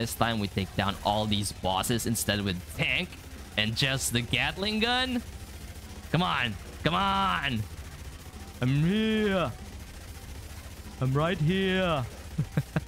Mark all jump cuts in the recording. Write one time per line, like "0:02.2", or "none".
none